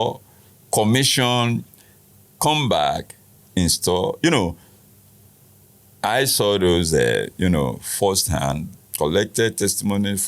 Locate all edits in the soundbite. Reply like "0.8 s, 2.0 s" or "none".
none